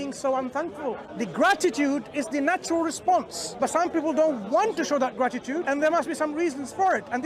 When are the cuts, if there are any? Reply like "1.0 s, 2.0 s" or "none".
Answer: 1.1 s, 3.4 s, 5.6 s